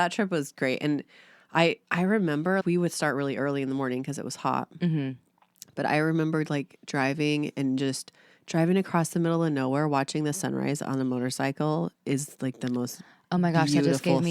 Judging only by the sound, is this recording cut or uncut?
cut